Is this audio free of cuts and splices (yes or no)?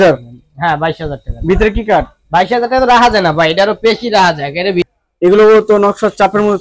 no